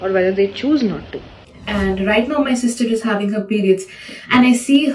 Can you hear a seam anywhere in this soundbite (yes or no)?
no